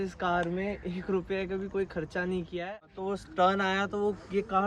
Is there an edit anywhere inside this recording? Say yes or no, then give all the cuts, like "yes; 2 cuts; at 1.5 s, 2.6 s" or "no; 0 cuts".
yes; 1 cut; at 2.7 s